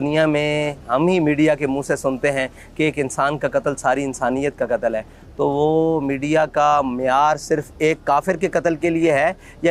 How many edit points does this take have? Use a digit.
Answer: 0